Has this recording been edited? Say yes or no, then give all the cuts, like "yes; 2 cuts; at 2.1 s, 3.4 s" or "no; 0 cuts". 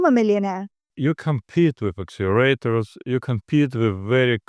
yes; 1 cut; at 0.9 s